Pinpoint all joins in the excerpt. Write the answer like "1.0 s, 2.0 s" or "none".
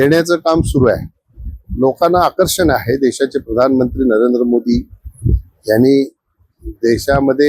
none